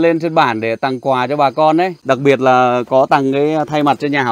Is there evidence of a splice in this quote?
yes; 1 cut; at 2.0 s

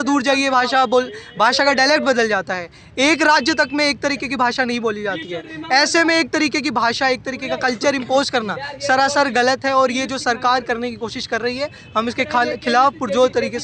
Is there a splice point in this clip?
no; 0 cuts

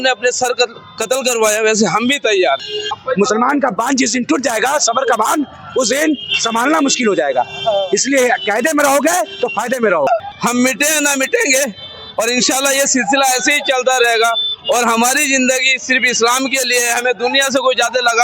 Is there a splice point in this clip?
yes; 2 cuts; at 2.8 s, 10.2 s

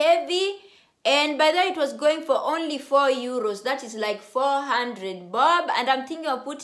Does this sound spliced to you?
no; 0 cuts

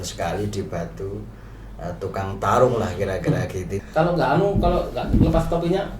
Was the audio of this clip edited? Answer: yes; 1 cut; at 3.8 s

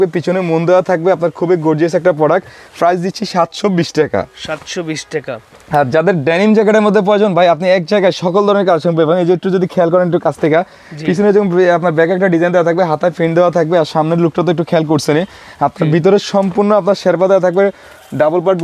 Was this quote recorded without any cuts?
yes; 0 cuts

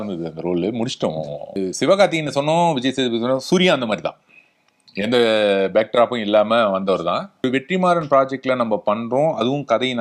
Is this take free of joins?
no; 2 cuts; at 1.5 s, 7.4 s

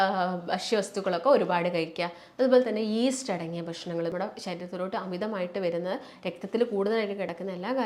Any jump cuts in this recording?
yes; 1 cut; at 4.1 s

